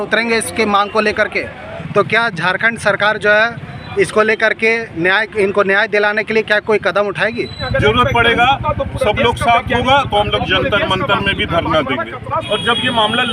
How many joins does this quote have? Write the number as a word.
three